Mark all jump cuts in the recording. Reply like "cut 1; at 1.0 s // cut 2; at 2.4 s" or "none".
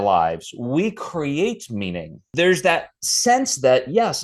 cut 1; at 2.3 s